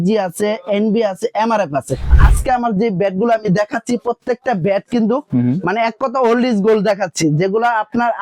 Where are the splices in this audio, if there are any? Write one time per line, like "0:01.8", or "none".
0:02.1